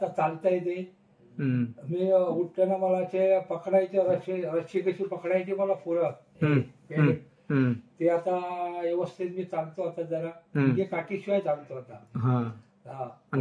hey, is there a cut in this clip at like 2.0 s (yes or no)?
yes